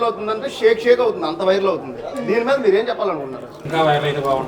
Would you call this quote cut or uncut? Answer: cut